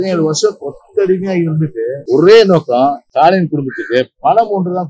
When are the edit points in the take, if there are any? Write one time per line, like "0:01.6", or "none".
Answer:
0:02.0
0:03.0